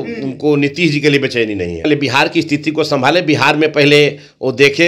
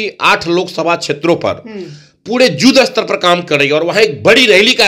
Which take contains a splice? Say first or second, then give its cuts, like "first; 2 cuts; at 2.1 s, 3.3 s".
first; 1 cut; at 1.8 s